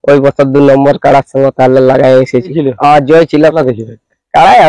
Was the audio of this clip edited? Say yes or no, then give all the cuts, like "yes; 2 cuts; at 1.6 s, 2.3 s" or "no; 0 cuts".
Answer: yes; 2 cuts; at 2.5 s, 3.5 s